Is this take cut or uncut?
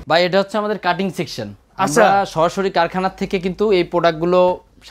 uncut